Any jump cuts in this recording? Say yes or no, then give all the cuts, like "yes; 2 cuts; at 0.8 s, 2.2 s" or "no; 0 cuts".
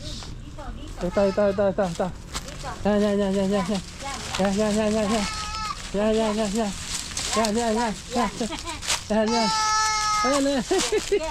no; 0 cuts